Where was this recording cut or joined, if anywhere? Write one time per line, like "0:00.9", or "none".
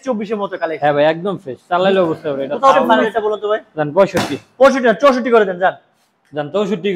0:02.9